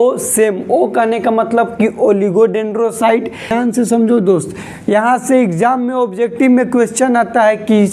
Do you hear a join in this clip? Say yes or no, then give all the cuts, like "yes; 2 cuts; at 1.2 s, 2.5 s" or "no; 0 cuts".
yes; 1 cut; at 3.5 s